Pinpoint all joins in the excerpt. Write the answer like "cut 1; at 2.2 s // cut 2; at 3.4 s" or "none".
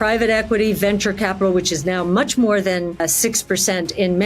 cut 1; at 3.0 s